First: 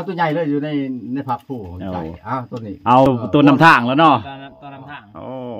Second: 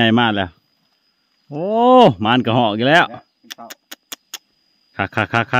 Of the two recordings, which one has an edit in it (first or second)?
first